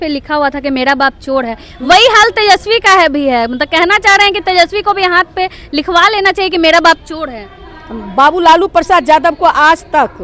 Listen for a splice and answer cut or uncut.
uncut